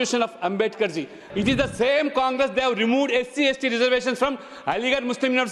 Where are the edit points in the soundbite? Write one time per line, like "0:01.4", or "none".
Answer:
0:01.2